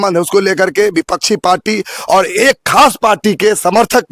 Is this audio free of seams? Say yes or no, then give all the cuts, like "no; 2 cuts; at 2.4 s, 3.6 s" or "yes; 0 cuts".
yes; 0 cuts